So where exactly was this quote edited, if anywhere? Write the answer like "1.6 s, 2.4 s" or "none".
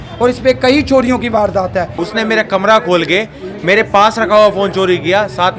2.0 s